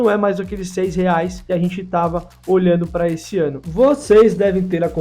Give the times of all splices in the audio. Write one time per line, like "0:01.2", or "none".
0:01.4
0:03.6